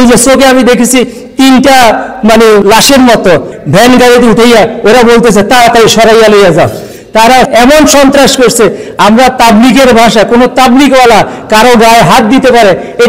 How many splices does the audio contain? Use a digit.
3